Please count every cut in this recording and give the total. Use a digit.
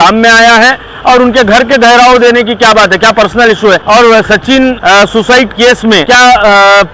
3